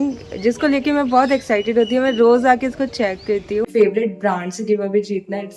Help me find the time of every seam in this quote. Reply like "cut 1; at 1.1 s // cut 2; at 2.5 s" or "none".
cut 1; at 3.7 s